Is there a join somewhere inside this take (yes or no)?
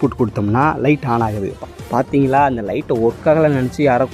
yes